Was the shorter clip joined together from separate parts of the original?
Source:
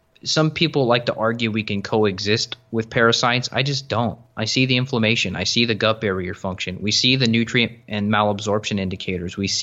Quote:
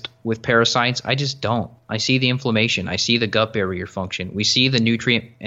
no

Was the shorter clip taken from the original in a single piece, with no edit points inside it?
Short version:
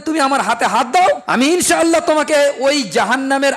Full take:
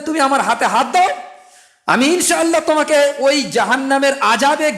no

